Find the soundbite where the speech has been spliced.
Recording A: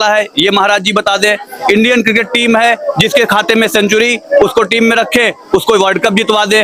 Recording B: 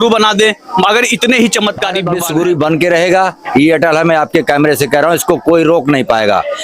B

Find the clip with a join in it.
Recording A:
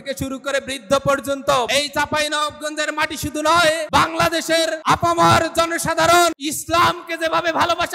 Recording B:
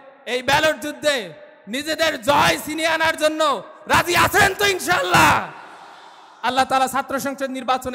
A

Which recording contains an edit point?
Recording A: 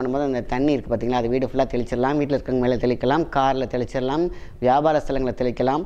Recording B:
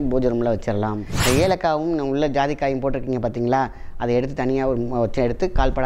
B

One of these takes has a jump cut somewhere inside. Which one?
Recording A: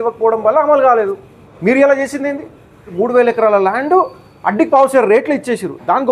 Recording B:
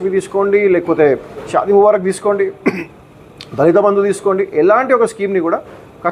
A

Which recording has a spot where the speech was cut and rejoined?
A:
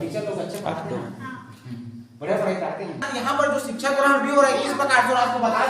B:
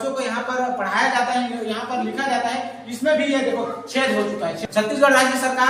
A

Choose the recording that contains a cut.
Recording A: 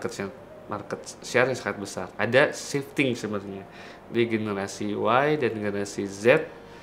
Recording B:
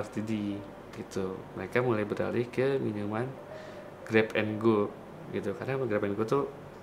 A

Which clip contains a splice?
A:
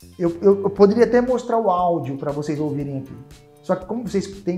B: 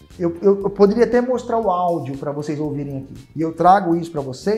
B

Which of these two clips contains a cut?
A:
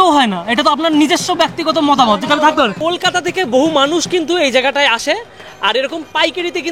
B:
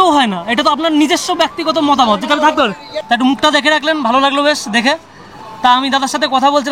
A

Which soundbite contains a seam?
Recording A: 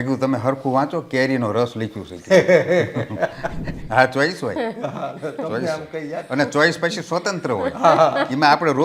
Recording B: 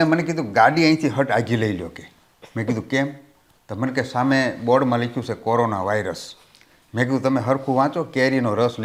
A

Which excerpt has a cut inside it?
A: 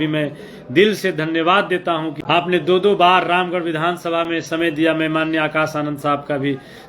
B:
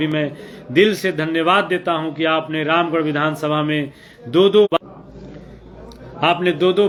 A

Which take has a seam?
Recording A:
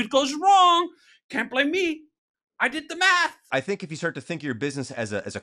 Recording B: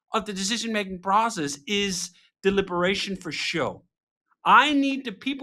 A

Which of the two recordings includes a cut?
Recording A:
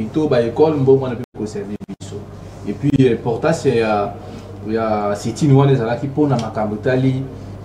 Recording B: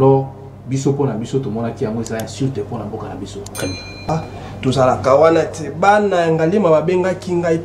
B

